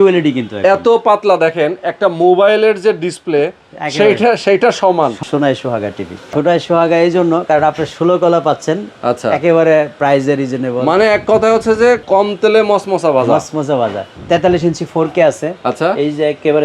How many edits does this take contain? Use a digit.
4